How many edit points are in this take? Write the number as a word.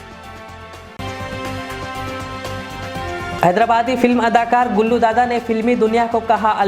two